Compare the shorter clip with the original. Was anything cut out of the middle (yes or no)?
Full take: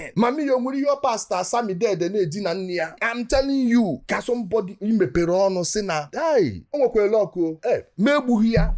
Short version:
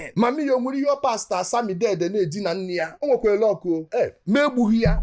yes